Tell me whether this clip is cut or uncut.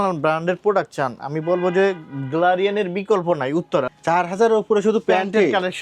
cut